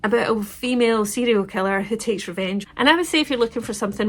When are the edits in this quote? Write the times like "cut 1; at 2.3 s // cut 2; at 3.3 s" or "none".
cut 1; at 2.7 s